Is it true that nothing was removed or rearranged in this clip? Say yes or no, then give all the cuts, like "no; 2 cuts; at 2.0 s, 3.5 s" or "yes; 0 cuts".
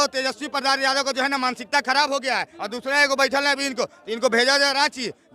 no; 1 cut; at 2.5 s